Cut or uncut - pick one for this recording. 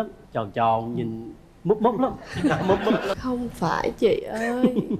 cut